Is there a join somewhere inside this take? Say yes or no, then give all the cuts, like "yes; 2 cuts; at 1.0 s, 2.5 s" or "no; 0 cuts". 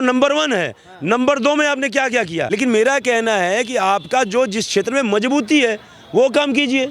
yes; 1 cut; at 2.4 s